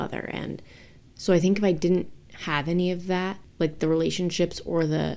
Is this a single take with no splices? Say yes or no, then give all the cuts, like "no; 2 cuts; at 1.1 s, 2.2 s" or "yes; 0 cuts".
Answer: no; 1 cut; at 1.0 s